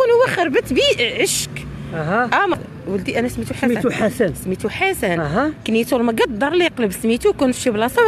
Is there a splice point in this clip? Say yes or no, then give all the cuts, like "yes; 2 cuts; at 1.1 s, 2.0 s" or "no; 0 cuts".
yes; 1 cut; at 2.5 s